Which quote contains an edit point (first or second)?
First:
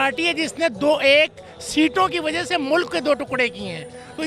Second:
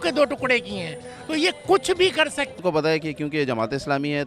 second